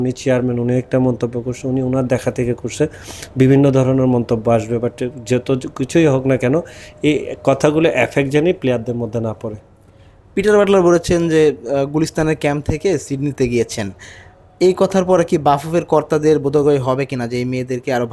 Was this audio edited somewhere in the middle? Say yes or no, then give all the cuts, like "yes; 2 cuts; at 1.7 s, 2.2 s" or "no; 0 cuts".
no; 0 cuts